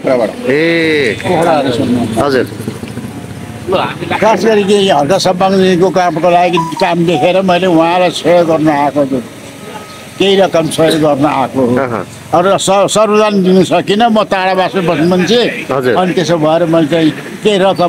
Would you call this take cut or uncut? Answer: uncut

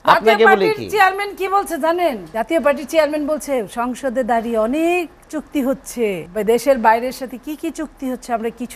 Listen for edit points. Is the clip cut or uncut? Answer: cut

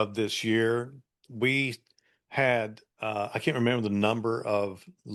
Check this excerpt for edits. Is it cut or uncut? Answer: uncut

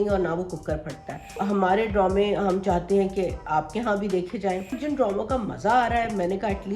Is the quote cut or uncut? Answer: cut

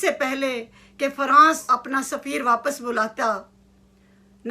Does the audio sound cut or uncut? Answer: cut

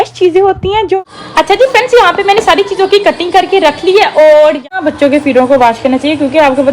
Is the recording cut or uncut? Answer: cut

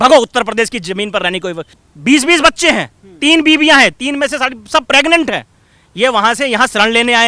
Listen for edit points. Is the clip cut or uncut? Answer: cut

